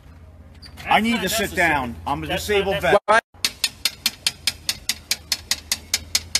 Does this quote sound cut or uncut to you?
cut